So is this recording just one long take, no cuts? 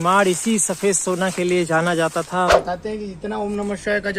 no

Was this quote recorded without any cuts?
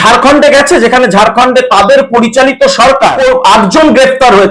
no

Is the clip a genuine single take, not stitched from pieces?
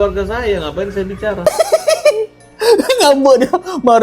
no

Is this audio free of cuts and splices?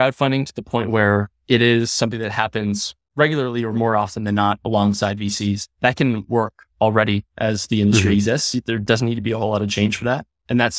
yes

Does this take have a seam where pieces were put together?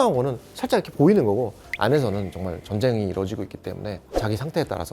yes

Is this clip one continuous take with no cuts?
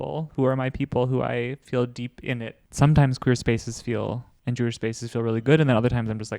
no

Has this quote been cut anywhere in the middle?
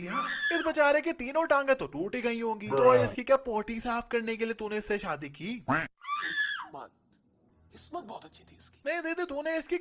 no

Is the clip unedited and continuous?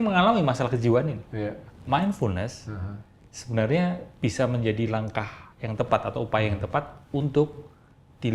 no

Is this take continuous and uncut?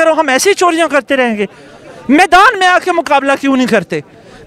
yes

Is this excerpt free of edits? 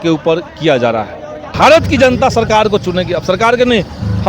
no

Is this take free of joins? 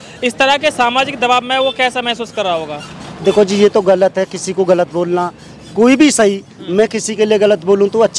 yes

